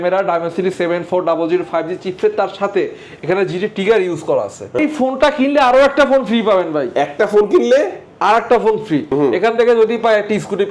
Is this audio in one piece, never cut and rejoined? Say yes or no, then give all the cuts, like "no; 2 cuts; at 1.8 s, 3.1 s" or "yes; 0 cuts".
no; 2 cuts; at 4.8 s, 9.1 s